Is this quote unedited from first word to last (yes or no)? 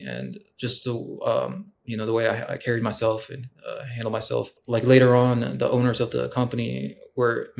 no